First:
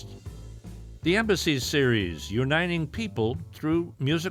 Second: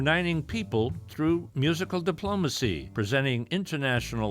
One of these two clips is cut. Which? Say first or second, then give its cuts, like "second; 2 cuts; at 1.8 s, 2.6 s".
second; 1 cut; at 2.9 s